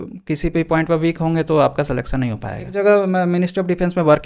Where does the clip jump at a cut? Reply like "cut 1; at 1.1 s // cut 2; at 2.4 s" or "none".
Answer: cut 1; at 2.7 s

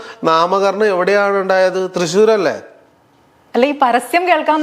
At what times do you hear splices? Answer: none

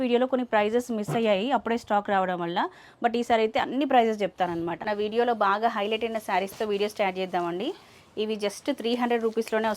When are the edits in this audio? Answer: cut 1; at 4.8 s

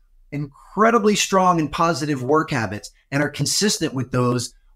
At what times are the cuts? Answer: none

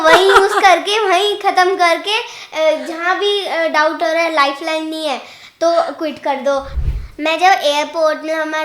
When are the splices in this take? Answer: cut 1; at 6.8 s

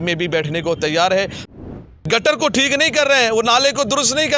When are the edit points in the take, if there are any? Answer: cut 1; at 1.7 s

